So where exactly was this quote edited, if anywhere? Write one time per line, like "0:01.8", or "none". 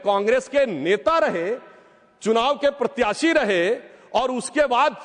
none